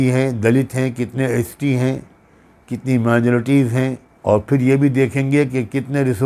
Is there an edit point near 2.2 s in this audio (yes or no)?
no